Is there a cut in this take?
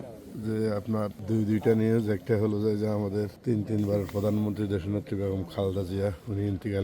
yes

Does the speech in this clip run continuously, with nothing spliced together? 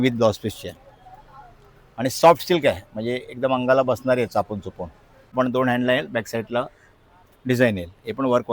no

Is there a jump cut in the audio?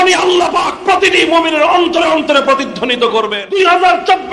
yes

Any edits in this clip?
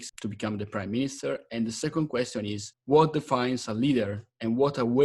no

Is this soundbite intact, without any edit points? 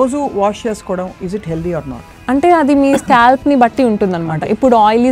no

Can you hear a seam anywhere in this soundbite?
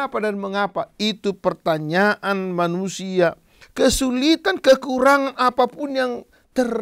yes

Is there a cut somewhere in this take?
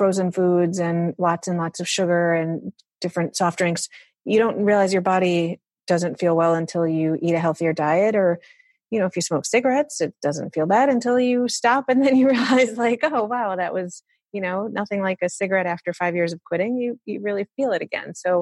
yes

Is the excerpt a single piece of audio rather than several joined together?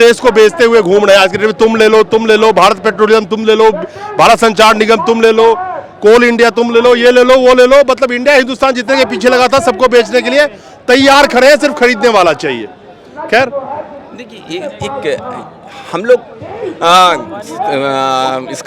yes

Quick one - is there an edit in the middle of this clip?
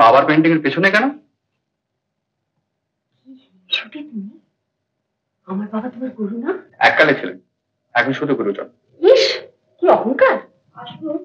no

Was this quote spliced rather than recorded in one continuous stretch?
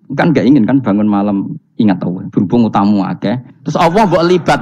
no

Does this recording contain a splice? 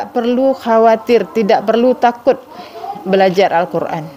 no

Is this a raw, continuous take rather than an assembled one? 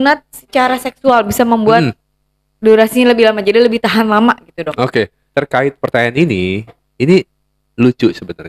no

